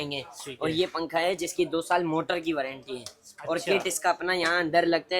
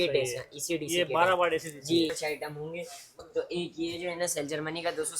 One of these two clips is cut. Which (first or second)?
second